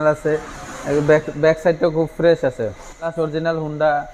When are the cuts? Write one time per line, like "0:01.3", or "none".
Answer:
0:03.1